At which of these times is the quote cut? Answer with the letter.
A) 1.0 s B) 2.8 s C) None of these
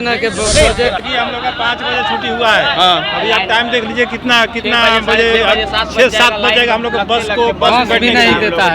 A